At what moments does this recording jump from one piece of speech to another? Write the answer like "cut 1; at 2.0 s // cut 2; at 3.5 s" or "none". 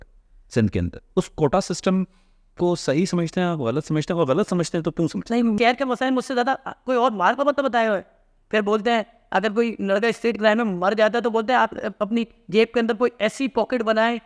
cut 1; at 5.6 s